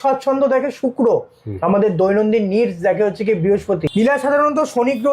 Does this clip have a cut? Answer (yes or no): yes